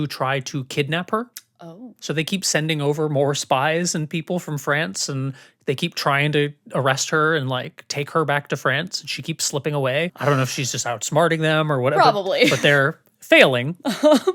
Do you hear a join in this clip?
no; 0 cuts

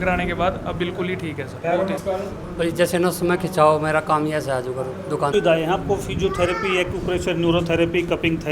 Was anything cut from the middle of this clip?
yes; 2 cuts; at 2.0 s, 5.3 s

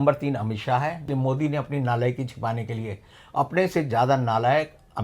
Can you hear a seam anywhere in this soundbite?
yes; 1 cut; at 1.1 s

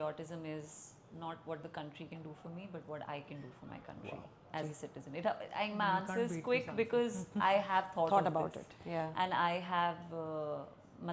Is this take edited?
no; 0 cuts

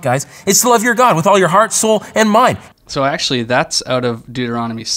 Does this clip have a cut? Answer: no; 0 cuts

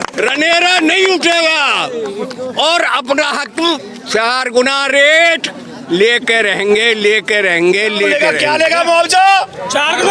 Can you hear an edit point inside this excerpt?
yes; 1 cut; at 8.1 s

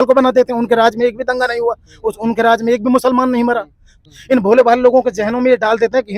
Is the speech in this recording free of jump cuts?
no; 1 cut; at 4.1 s

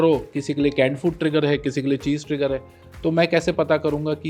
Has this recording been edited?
no; 0 cuts

